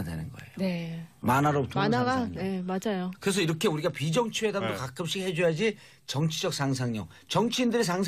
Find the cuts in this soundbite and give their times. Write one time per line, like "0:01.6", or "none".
0:02.4